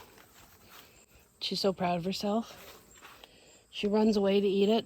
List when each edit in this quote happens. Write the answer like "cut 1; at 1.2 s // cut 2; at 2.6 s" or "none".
none